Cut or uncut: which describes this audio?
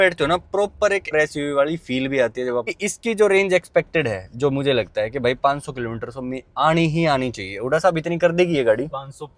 cut